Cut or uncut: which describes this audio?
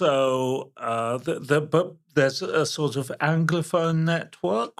uncut